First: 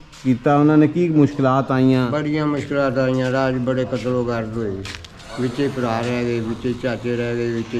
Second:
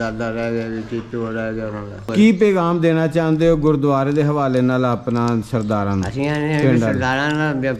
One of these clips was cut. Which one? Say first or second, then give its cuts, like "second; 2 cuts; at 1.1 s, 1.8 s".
second; 1 cut; at 2.1 s